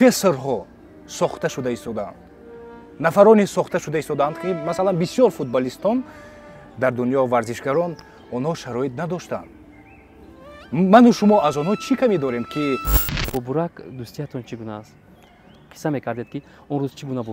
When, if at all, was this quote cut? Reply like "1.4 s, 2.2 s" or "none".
13.1 s